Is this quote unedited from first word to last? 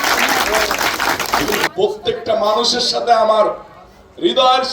no; 1 cut; at 1.6 s

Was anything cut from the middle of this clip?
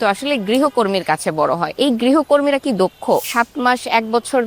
yes; 2 cuts; at 1.7 s, 3.3 s

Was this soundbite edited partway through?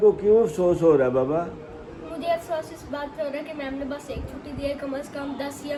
no; 0 cuts

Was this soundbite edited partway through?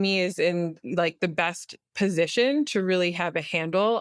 no; 0 cuts

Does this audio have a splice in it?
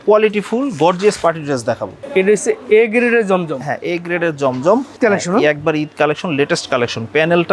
yes; 2 cuts; at 1.9 s, 5.0 s

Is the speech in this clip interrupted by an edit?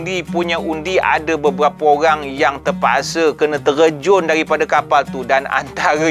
no; 0 cuts

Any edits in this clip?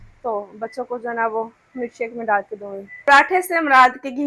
yes; 1 cut; at 3.0 s

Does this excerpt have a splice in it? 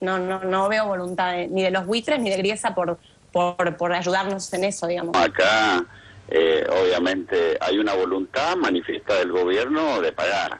yes; 1 cut; at 5.1 s

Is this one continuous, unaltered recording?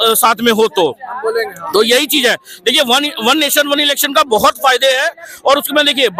yes; 0 cuts

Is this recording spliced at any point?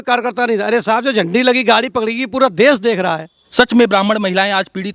yes; 1 cut; at 3.4 s

